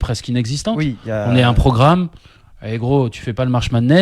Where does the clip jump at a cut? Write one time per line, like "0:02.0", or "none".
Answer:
0:01.1